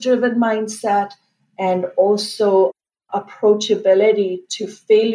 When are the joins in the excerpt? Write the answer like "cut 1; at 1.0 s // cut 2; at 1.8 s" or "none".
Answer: none